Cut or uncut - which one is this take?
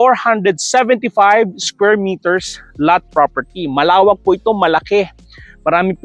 uncut